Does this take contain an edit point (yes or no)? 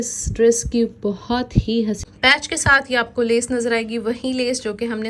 yes